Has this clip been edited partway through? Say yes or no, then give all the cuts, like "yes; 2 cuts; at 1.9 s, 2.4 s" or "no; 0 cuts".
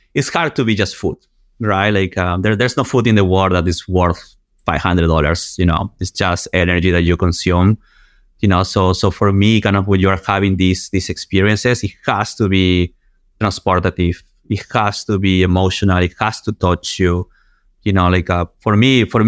no; 0 cuts